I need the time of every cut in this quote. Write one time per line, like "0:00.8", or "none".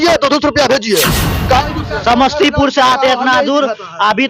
0:01.3